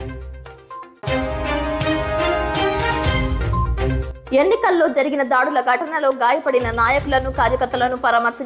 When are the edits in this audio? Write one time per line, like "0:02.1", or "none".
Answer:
0:04.1